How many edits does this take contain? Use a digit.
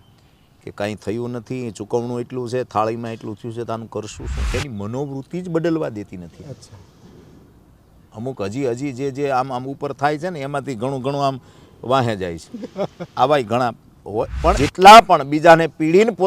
2